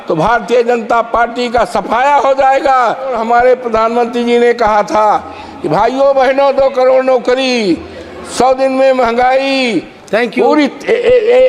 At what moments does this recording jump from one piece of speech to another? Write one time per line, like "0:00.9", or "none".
0:03.2
0:10.0